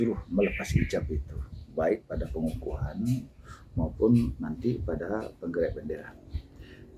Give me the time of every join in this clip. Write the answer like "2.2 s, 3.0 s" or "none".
none